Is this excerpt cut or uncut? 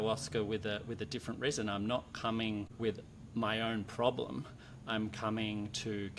cut